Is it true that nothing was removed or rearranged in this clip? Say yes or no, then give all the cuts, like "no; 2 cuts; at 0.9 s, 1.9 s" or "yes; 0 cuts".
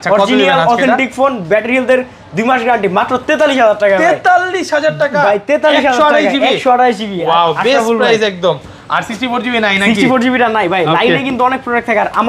yes; 0 cuts